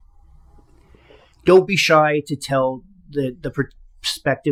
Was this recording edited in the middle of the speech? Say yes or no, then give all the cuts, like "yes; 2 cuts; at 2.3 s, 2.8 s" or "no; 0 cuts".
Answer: no; 0 cuts